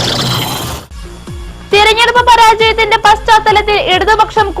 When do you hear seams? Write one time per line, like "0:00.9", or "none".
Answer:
0:00.9